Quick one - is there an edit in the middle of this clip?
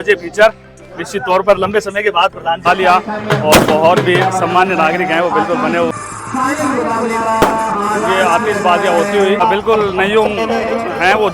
yes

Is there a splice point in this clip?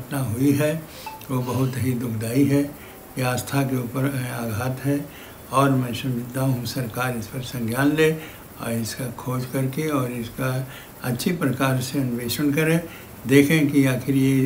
no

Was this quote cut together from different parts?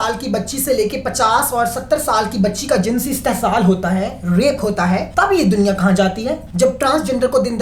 yes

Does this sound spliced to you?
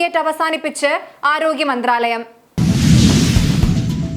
yes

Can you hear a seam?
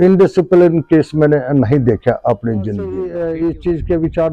yes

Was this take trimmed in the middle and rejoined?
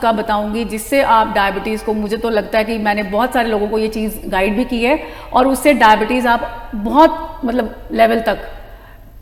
no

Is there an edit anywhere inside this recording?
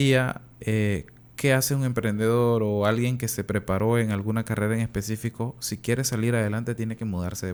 no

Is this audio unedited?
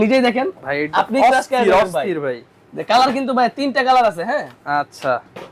yes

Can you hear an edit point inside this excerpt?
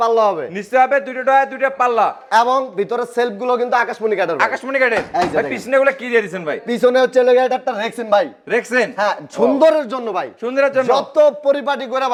no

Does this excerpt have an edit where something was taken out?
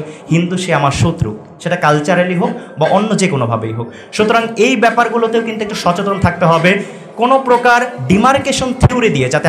no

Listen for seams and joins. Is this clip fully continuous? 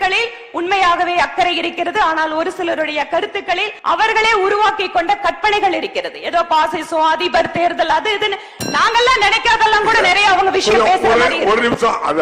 no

